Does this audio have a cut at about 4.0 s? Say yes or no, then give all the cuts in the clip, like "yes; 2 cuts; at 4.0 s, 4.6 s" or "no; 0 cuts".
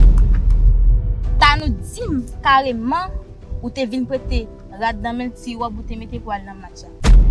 no; 1 cut; at 0.9 s